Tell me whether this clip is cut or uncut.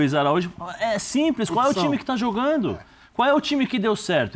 uncut